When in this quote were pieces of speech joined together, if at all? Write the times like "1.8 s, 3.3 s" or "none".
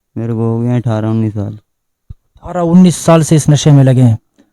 none